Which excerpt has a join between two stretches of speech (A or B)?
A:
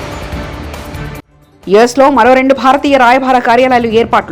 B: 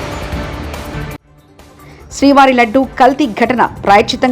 A